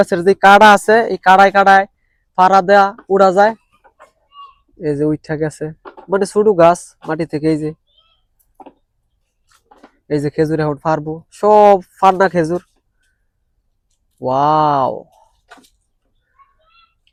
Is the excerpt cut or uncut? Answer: uncut